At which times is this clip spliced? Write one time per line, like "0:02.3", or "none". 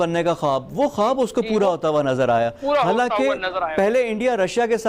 none